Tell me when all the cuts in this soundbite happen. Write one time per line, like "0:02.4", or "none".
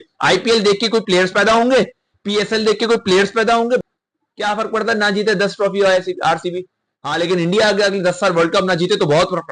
0:03.8